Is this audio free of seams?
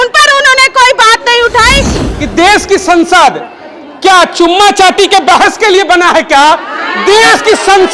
no; 1 cut; at 1.9 s

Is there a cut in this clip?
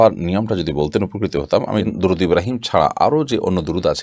yes; 1 cut; at 1.8 s

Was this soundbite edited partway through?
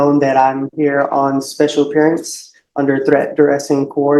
no; 0 cuts

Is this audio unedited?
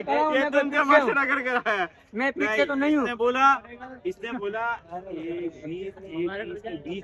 yes; 0 cuts

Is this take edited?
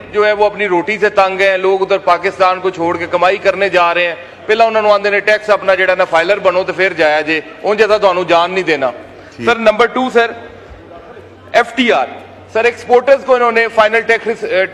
no; 0 cuts

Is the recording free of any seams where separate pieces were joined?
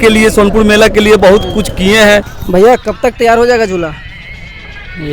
no; 1 cut; at 2.4 s

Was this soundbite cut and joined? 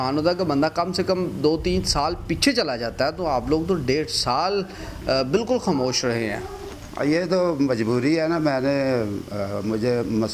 no; 0 cuts

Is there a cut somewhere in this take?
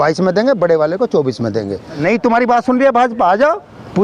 yes; 1 cut; at 2.0 s

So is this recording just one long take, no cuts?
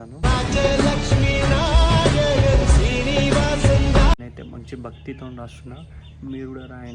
no; 1 cut; at 4.1 s

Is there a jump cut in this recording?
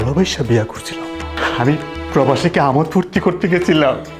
yes; 1 cut; at 1.3 s

